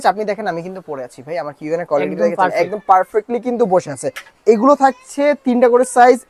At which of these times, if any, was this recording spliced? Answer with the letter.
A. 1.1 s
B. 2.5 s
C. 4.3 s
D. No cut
C